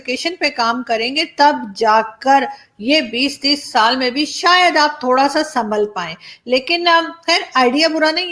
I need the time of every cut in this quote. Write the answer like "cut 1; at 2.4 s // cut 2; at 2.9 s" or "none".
none